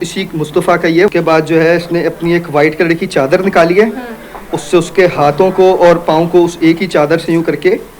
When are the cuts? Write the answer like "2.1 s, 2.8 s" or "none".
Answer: 1.1 s